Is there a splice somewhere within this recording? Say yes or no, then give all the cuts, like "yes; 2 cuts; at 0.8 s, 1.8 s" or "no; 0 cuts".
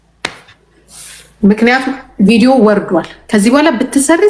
no; 0 cuts